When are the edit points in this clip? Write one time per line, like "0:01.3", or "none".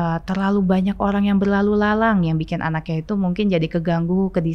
none